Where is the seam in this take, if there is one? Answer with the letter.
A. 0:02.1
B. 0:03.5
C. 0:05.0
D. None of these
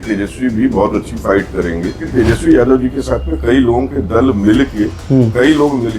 A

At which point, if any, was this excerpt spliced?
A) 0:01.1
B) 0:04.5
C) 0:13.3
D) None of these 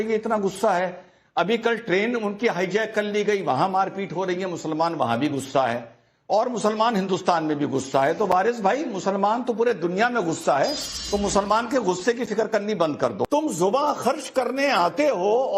C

